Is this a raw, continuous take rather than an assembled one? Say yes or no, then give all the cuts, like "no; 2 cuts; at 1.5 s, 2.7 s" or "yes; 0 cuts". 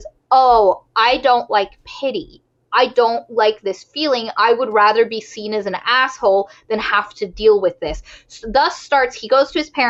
yes; 0 cuts